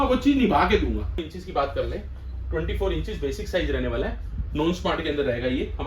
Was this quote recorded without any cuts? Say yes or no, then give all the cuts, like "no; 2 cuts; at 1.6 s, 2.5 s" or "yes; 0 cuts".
no; 1 cut; at 1.2 s